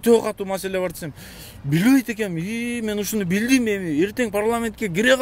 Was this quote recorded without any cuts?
yes; 0 cuts

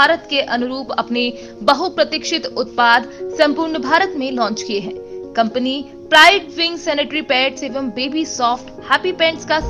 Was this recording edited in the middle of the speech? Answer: no; 0 cuts

